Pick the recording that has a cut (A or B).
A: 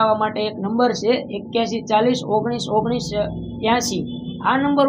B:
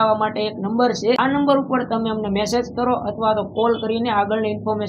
B